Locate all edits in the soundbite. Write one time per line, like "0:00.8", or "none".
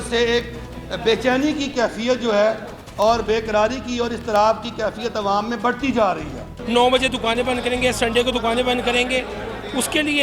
0:06.5